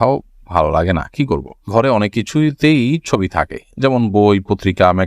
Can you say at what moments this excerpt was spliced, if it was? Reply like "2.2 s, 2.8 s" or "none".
1.7 s

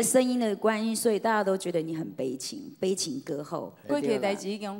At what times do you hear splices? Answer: 3.9 s

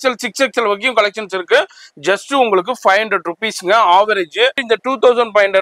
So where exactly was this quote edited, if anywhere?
4.6 s

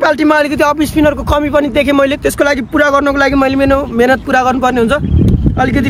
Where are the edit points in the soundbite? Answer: none

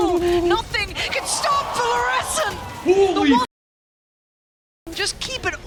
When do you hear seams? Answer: none

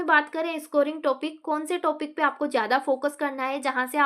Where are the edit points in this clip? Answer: none

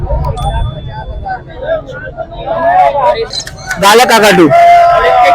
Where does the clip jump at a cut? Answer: 3.3 s

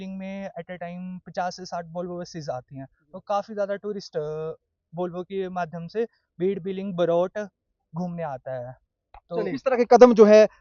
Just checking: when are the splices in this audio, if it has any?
9.5 s

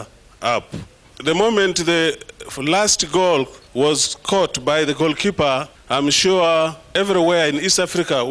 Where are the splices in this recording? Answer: 1.0 s, 3.6 s, 5.8 s, 6.9 s

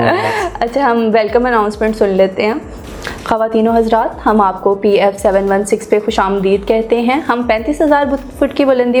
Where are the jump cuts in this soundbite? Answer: none

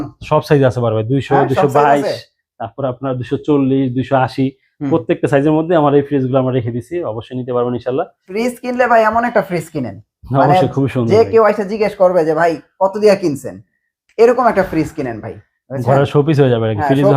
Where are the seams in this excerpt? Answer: 8.3 s

